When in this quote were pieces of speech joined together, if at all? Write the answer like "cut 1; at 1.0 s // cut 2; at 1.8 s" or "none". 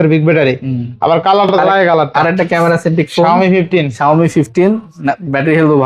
cut 1; at 1.5 s

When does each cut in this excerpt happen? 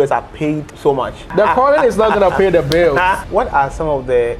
cut 1; at 1.2 s // cut 2; at 3.2 s

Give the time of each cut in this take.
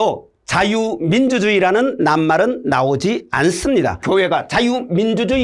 cut 1; at 4.0 s

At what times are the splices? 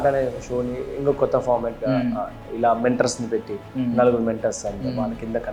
none

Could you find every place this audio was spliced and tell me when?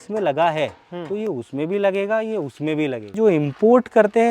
cut 1; at 3.1 s

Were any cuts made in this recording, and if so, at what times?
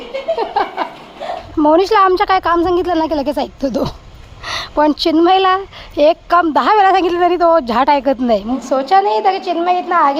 cut 1; at 1.4 s // cut 2; at 8.5 s

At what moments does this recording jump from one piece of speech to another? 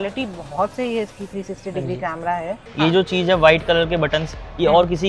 cut 1; at 2.6 s

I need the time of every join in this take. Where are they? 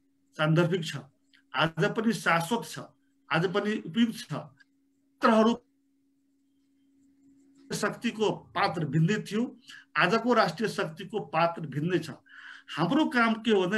none

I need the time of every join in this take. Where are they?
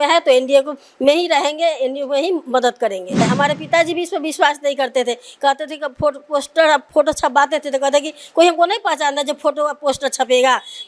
cut 1; at 3.2 s

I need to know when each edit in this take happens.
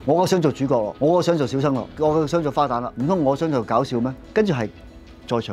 cut 1; at 0.9 s // cut 2; at 1.9 s // cut 3; at 2.9 s // cut 4; at 4.2 s

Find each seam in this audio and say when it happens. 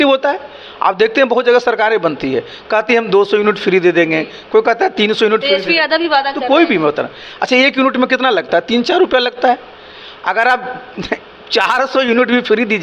none

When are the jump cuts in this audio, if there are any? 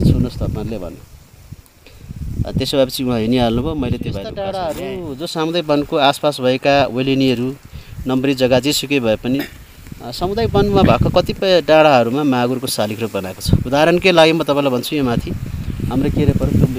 cut 1; at 4.2 s

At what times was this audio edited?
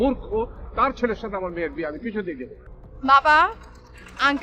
cut 1; at 2.6 s

